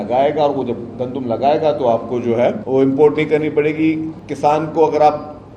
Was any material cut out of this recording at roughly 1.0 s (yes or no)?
no